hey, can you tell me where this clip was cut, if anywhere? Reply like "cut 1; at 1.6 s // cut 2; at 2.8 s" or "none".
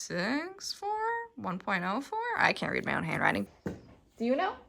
cut 1; at 3.4 s

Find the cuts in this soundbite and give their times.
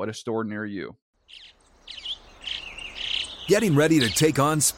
cut 1; at 1.0 s

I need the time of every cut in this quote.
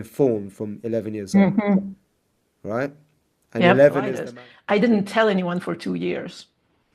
cut 1; at 4.2 s

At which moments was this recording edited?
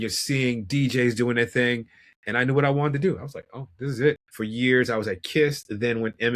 cut 1; at 4.2 s

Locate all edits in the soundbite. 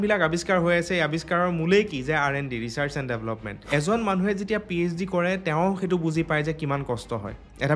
cut 1; at 3.5 s

